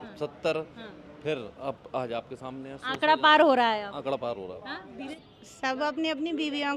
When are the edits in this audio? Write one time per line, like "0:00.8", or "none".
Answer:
0:05.2

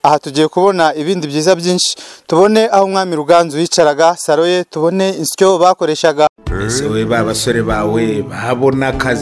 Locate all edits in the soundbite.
none

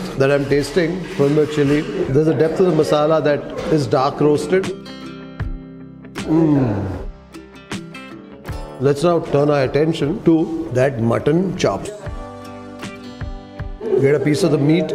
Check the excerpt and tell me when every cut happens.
0:04.7
0:08.8

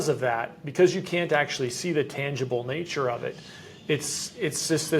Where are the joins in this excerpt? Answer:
none

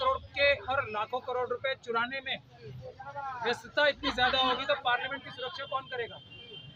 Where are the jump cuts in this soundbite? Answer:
none

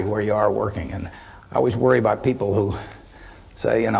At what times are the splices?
none

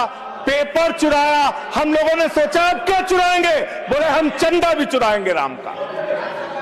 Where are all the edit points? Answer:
none

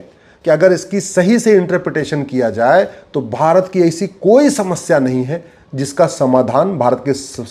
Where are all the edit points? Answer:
none

